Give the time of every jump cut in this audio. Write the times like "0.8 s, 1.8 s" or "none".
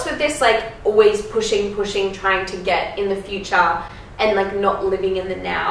none